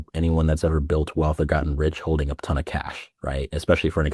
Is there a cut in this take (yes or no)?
no